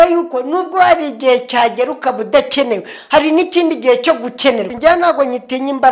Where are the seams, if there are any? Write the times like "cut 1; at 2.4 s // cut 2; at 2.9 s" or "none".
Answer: cut 1; at 4.7 s